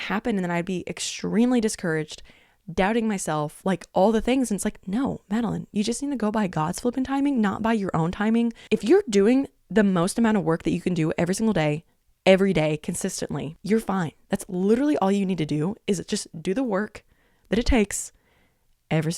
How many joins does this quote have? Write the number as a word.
two